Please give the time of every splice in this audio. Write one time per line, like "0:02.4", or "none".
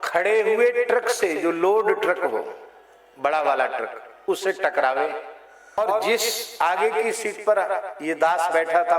0:05.8